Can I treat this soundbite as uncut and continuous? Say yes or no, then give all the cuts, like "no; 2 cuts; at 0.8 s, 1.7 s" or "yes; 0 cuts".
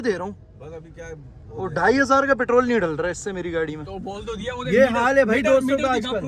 yes; 0 cuts